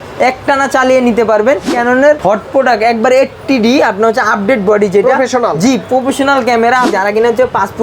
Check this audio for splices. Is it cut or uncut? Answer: cut